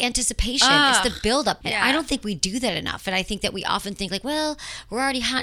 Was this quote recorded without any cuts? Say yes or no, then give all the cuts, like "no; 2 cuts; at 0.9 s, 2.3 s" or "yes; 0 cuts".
no; 1 cut; at 1.6 s